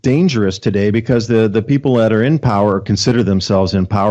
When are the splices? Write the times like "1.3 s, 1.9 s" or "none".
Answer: none